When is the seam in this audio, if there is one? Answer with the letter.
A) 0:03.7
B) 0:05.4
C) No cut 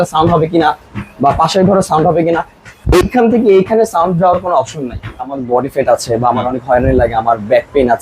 B